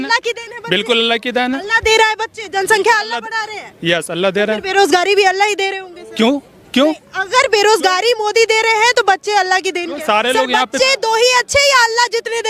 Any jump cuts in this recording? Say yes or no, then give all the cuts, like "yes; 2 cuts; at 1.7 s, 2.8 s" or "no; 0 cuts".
no; 0 cuts